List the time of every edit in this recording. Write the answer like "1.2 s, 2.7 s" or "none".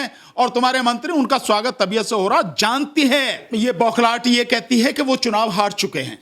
3.4 s